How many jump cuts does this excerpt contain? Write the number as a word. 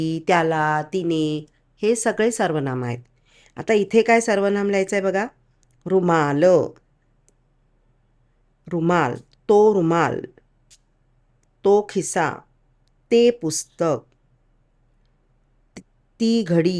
zero